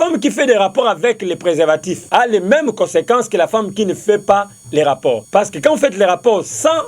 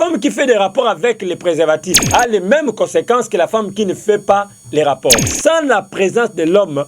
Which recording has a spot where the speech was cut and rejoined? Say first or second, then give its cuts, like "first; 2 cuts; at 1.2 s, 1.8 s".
second; 1 cut; at 5.2 s